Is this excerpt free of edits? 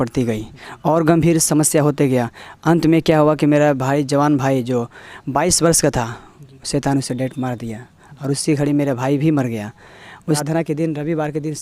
no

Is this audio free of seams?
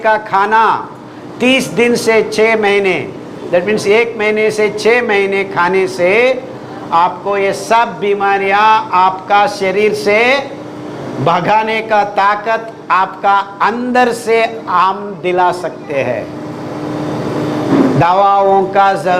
yes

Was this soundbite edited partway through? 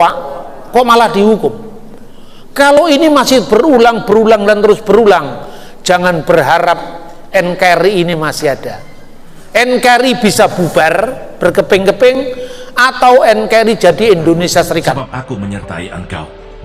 yes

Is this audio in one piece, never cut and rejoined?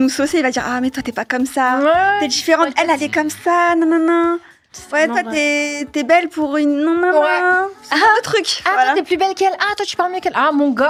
yes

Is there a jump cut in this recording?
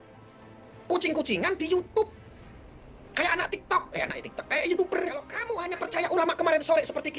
yes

